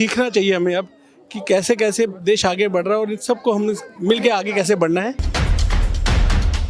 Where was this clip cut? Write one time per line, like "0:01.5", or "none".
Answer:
0:05.3

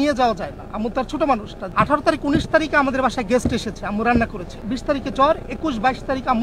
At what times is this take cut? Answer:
0:01.6
0:04.5

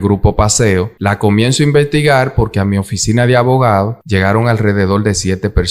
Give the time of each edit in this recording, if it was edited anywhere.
0:00.9
0:04.0

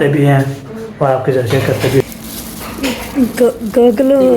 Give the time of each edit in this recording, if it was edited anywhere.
0:02.0

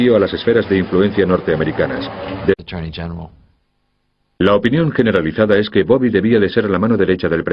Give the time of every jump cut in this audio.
none

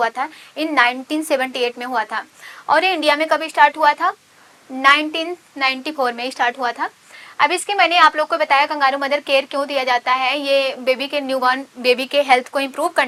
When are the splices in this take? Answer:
none

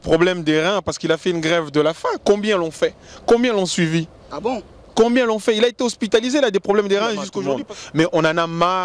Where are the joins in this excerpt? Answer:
0:07.4

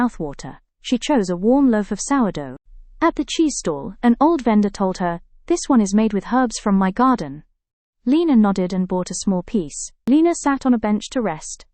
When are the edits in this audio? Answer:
0:09.8

